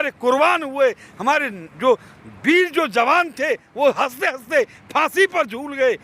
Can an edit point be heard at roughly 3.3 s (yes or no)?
no